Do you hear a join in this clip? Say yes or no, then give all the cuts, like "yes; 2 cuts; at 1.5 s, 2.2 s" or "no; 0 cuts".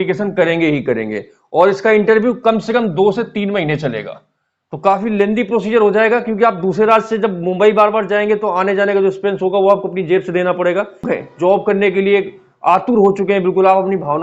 yes; 1 cut; at 11.1 s